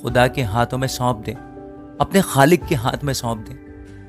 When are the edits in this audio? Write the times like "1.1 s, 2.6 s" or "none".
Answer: none